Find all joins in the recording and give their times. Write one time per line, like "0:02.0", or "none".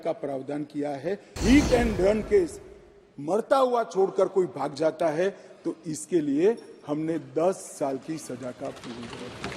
0:01.4